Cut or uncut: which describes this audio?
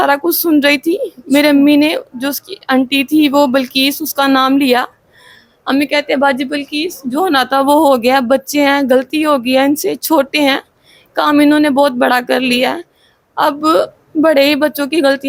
uncut